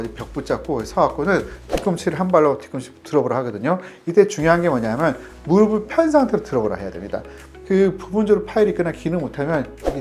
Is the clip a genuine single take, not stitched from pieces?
yes; 0 cuts

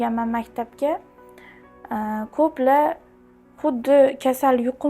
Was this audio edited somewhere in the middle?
no; 0 cuts

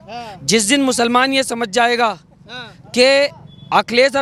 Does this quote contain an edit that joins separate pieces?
no; 0 cuts

